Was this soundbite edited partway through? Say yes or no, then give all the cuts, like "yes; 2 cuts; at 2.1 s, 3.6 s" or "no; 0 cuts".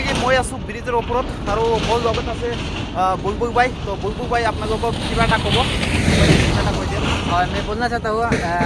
no; 0 cuts